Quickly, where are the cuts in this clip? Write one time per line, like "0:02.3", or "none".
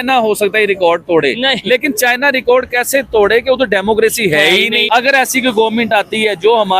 0:04.8